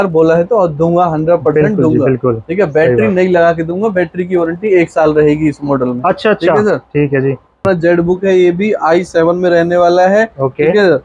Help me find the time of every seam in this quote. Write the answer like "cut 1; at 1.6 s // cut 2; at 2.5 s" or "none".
cut 1; at 7.6 s